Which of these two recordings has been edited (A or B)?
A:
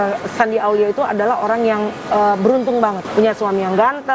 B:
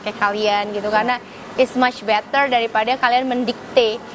A